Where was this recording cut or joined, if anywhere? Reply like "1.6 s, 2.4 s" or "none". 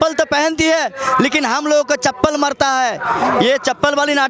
none